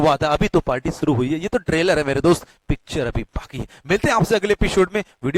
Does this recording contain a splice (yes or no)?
no